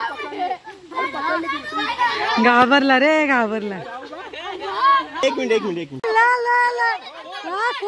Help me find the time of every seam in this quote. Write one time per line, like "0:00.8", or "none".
0:06.0